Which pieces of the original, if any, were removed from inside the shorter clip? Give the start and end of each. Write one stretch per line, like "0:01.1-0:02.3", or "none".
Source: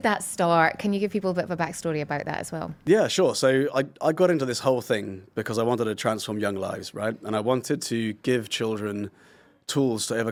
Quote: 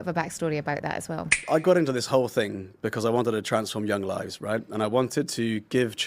0:02.8-0:03.9